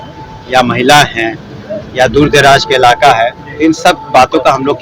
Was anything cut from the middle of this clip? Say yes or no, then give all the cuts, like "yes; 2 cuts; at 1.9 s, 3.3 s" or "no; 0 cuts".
no; 0 cuts